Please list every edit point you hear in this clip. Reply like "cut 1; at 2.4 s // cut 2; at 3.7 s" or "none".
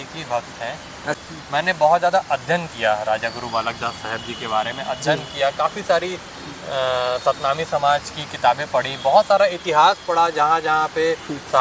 cut 1; at 1.2 s